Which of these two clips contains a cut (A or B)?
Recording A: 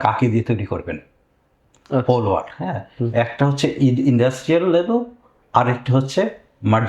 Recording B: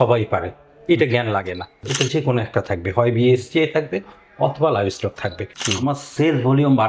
B